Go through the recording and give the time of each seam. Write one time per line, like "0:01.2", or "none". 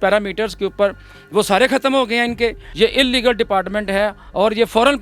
0:02.6